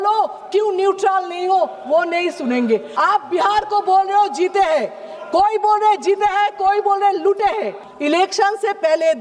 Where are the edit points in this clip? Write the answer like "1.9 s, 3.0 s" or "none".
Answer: 2.9 s, 7.8 s